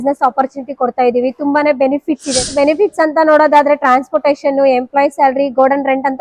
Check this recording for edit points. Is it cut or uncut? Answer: cut